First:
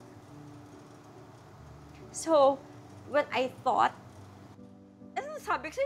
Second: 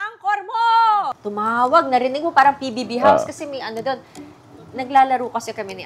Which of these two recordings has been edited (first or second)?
second